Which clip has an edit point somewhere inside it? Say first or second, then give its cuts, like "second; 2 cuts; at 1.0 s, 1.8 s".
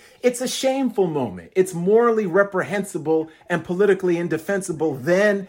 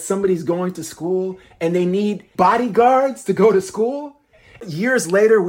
second; 2 cuts; at 2.3 s, 4.6 s